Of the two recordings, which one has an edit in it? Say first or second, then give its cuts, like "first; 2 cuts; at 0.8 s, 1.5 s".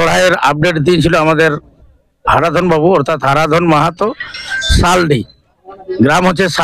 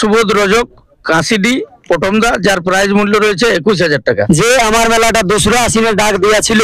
second; 1 cut; at 4.2 s